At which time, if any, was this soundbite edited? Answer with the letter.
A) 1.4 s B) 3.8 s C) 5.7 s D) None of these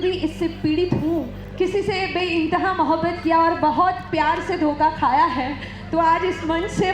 A